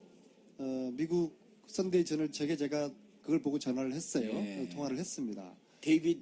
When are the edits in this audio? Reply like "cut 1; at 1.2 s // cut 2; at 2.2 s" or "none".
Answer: cut 1; at 2.1 s